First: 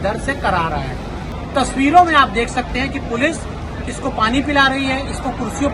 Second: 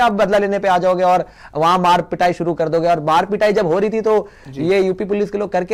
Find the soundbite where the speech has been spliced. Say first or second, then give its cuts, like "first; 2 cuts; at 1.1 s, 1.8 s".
first; 1 cut; at 1.2 s